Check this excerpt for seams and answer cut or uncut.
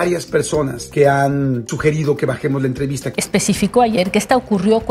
cut